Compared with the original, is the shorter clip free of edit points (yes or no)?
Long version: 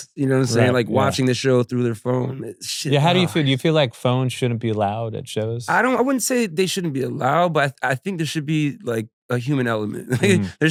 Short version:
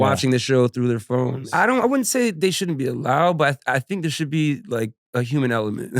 no